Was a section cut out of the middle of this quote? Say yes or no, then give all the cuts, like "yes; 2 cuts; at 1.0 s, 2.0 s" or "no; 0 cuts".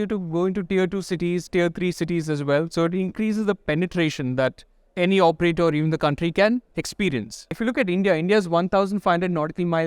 yes; 1 cut; at 7.6 s